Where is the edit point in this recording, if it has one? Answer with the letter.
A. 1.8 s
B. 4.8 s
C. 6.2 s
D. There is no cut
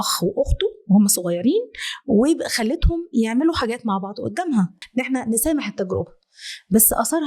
B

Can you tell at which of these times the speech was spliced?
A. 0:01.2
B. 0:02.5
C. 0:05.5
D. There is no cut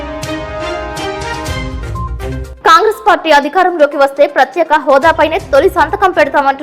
B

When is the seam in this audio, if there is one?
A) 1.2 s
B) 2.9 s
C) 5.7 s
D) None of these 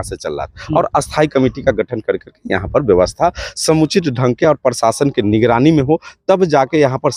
D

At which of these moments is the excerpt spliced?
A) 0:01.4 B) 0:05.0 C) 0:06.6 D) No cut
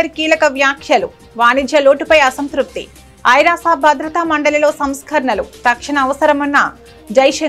D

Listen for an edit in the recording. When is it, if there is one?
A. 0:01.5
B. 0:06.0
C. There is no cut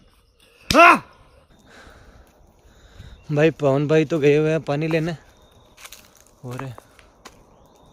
A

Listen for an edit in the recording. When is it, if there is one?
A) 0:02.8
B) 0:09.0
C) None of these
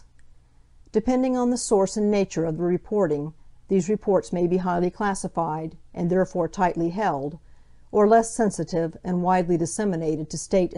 B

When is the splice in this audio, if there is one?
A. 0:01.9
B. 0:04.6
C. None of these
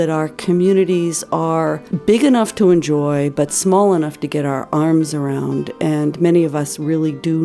A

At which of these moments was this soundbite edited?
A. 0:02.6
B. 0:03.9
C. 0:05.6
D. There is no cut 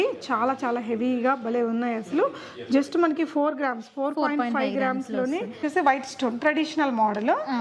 C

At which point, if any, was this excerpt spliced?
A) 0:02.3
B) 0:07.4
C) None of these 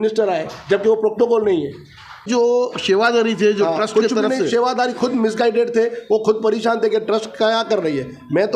A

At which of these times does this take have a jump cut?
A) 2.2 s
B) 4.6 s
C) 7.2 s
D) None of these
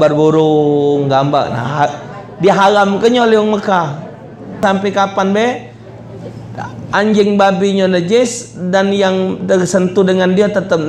B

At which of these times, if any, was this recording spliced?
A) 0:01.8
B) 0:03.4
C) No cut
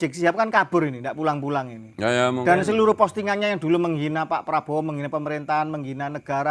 C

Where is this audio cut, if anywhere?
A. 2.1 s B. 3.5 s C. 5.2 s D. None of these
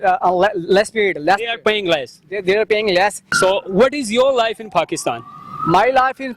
B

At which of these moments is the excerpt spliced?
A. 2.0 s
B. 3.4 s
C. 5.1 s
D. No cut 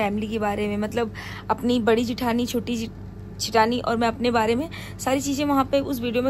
D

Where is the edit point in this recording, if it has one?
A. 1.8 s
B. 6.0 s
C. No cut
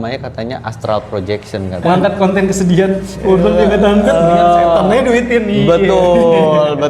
A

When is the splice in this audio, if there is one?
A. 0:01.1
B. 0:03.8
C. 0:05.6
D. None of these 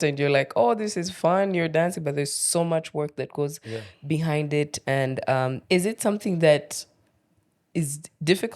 C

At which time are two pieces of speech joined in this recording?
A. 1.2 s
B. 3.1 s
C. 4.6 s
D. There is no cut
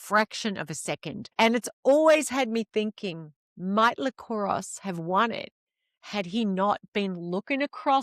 A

